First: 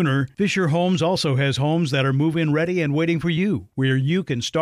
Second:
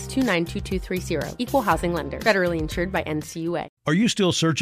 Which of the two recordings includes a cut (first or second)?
second